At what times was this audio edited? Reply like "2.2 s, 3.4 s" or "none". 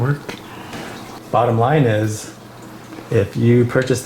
1.1 s